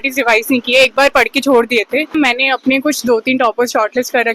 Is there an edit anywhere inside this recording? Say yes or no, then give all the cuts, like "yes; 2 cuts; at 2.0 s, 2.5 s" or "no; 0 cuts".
yes; 1 cut; at 2.1 s